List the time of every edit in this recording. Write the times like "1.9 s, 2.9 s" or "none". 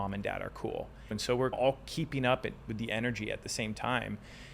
1.2 s

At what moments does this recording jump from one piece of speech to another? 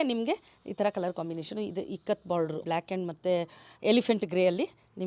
2.6 s

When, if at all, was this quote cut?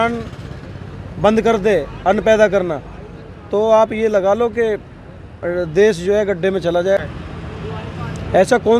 7.0 s

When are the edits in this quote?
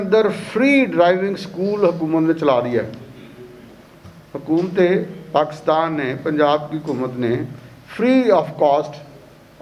none

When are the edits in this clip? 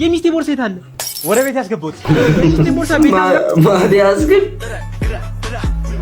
3.0 s

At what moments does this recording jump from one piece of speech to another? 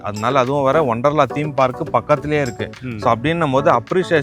none

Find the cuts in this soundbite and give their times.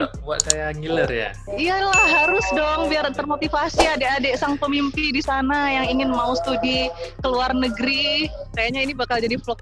8.5 s

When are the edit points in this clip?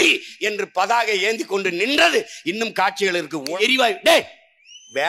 3.6 s

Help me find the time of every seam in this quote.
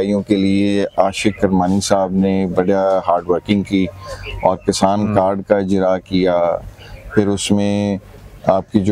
none

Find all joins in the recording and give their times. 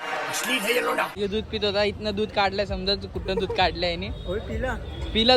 1.1 s

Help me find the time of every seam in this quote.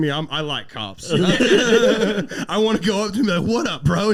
none

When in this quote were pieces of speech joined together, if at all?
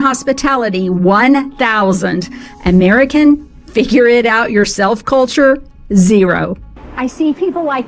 none

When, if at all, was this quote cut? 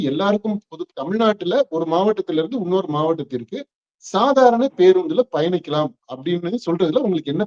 none

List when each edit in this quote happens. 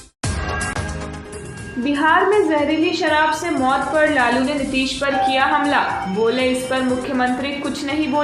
1.1 s

